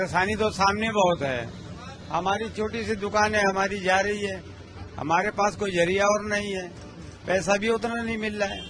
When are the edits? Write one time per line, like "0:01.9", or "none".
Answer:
none